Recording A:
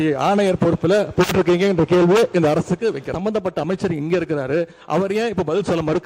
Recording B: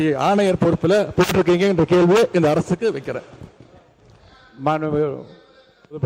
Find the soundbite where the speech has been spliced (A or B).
A